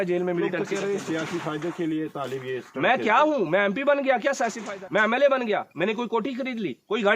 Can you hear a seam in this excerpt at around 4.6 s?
yes; 1 cut; at 4.6 s

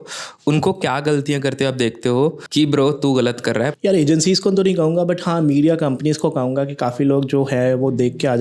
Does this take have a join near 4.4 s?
no; 0 cuts

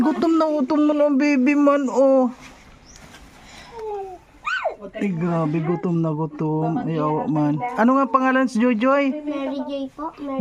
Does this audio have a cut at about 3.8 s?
yes; 1 cut; at 3.8 s

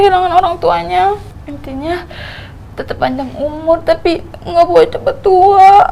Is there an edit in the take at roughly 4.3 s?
no; 1 cut; at 1.3 s

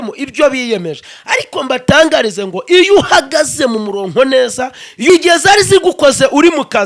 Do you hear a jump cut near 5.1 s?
yes; 1 cut; at 5.1 s

